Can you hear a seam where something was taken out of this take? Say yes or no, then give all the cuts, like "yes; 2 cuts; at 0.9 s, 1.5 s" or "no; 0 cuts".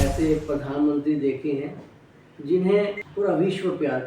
yes; 1 cut; at 3.0 s